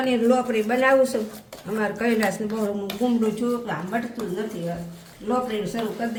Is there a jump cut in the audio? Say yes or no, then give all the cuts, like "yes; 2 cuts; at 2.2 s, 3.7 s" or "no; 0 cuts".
no; 0 cuts